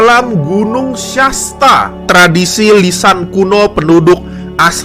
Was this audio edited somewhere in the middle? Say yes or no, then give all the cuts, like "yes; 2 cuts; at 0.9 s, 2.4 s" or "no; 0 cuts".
yes; 1 cut; at 2.1 s